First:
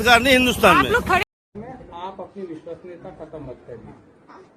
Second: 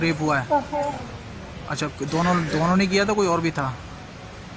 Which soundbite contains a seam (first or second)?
first